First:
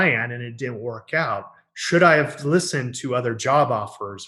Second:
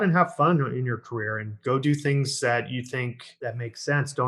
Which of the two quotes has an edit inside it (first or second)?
second